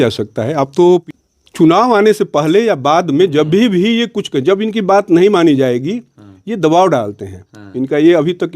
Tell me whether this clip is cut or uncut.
cut